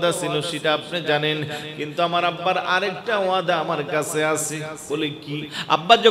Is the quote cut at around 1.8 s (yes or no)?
no